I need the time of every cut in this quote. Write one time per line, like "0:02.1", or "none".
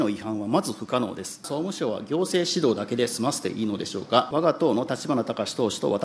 0:01.5
0:04.3